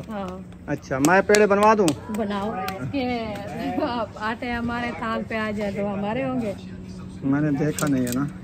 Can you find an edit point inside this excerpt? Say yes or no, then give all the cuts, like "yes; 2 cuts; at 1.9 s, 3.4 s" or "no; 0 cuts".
yes; 1 cut; at 2.8 s